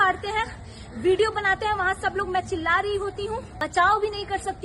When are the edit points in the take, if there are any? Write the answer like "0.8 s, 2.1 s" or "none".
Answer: 3.5 s

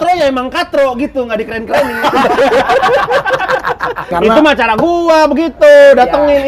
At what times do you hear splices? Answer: 4.1 s

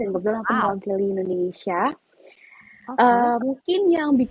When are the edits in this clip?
none

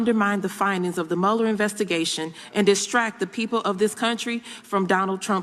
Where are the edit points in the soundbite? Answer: none

